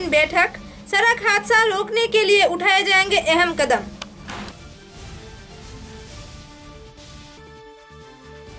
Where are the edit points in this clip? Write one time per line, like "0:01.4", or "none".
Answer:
none